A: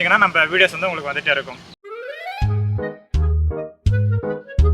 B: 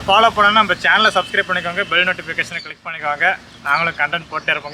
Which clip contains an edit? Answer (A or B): A